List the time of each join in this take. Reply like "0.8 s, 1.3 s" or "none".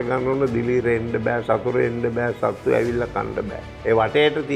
3.6 s